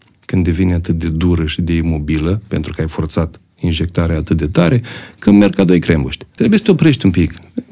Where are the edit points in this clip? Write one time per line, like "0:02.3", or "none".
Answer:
0:06.2